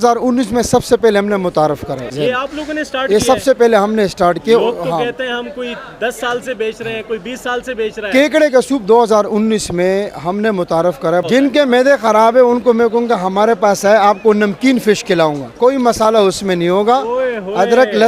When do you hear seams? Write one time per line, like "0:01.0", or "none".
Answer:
0:02.0
0:11.2